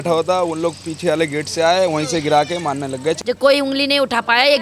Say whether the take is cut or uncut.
cut